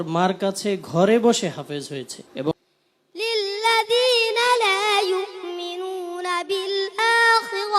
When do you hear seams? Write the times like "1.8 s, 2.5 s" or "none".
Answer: 2.5 s